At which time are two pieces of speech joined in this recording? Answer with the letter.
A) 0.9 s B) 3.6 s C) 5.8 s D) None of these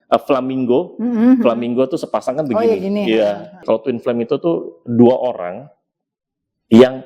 B